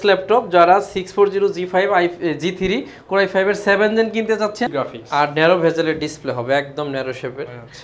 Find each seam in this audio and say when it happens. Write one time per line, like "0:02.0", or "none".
0:04.7